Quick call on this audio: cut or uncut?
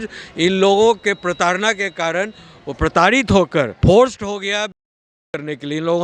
cut